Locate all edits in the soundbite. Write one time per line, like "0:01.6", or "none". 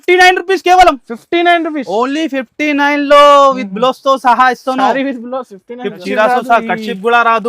0:06.0